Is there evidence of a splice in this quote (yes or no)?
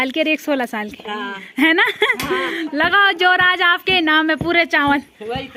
no